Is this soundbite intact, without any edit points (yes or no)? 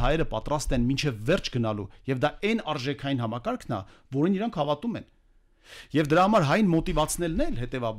yes